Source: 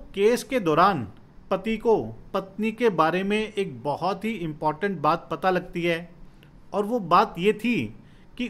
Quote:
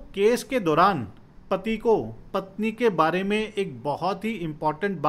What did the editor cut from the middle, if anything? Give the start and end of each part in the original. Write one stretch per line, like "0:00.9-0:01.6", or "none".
none